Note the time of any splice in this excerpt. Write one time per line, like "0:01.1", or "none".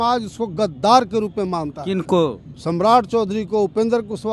0:02.5